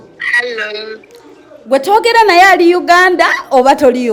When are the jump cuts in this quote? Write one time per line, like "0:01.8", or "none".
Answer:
none